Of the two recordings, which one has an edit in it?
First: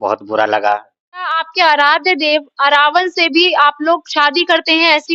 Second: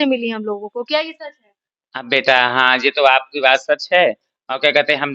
first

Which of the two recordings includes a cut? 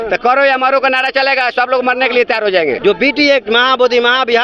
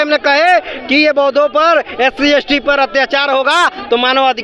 first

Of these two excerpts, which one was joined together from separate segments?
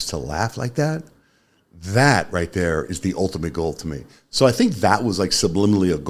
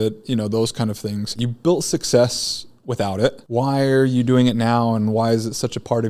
second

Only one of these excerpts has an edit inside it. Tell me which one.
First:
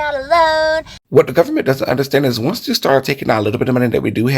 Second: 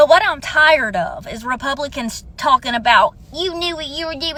first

